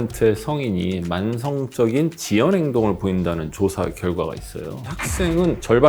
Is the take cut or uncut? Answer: cut